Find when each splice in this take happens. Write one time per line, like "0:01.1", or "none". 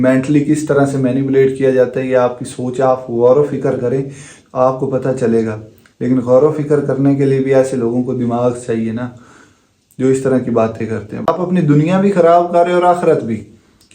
0:11.3